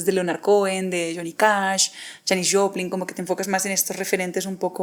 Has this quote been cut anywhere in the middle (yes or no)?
no